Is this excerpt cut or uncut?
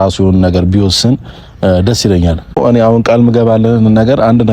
cut